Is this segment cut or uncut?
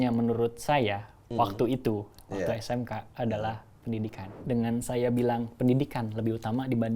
cut